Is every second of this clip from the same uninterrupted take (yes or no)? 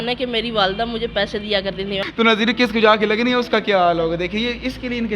no